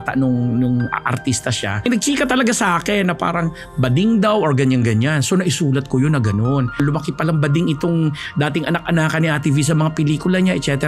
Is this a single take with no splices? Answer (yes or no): no